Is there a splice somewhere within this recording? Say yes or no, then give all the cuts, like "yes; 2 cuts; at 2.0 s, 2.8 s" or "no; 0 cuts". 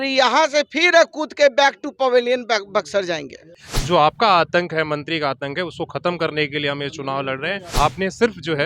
yes; 2 cuts; at 3.7 s, 7.6 s